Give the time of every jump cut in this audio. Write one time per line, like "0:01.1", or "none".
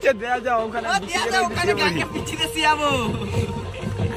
none